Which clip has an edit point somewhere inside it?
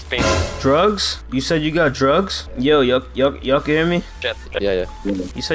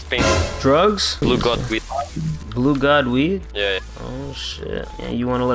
second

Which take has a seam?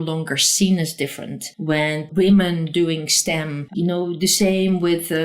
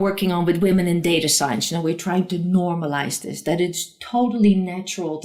first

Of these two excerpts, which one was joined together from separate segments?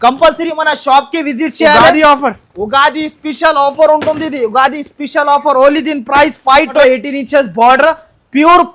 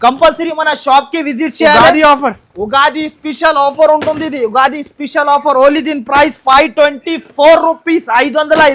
first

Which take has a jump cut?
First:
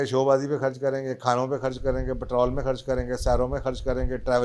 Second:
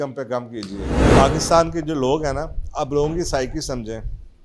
second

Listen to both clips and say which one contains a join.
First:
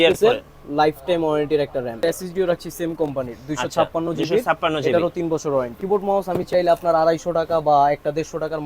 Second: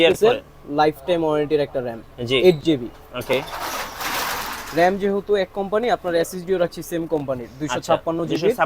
first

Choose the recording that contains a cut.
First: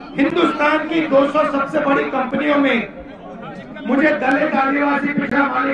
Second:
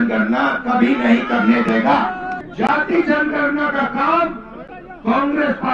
second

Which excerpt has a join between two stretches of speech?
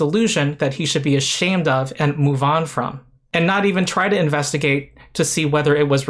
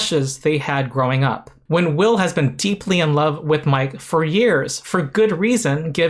second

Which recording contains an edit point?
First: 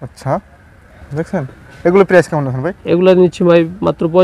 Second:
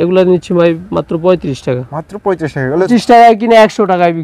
second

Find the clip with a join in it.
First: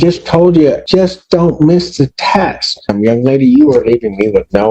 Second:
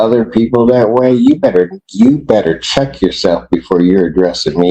first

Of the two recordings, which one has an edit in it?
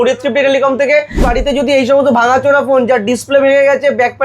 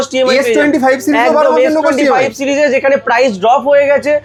first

